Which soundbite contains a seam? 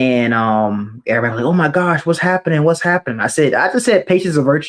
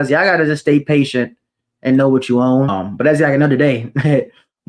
second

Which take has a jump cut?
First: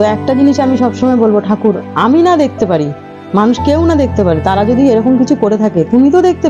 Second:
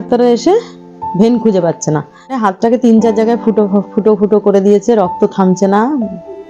second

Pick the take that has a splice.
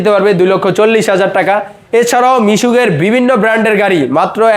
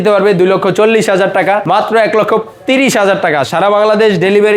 second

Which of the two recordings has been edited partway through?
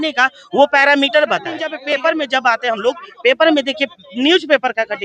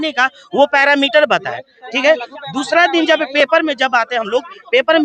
first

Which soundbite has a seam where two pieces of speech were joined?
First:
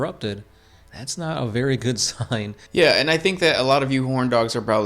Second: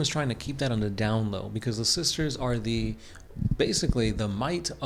first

